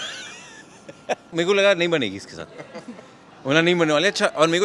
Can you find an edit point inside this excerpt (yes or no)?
yes